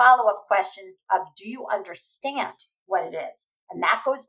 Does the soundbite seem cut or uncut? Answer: uncut